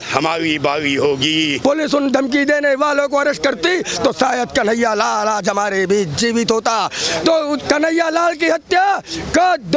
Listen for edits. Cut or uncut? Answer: cut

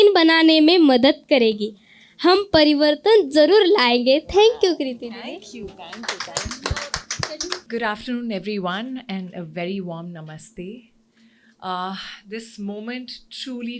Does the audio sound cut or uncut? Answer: cut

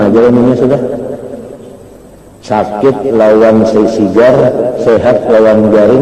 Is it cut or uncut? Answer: uncut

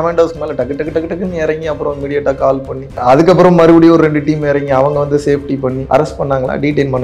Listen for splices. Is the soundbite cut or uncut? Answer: cut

